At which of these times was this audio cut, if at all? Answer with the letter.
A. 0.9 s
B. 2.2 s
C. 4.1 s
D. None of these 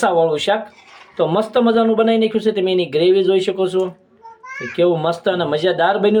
D